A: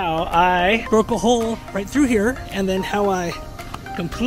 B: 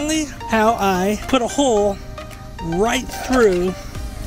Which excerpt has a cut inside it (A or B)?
B